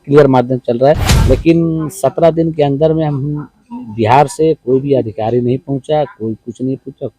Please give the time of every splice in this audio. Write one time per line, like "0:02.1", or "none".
0:01.1